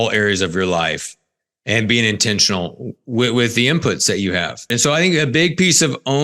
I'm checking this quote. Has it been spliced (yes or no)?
yes